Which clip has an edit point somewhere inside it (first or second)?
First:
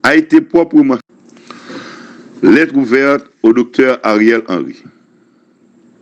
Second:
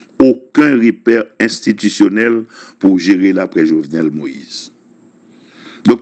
first